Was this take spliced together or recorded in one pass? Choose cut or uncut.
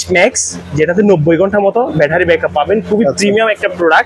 uncut